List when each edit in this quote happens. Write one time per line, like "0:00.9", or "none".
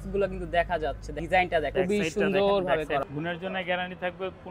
0:01.1
0:01.7
0:03.0